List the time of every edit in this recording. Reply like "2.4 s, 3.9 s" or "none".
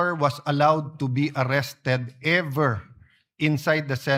none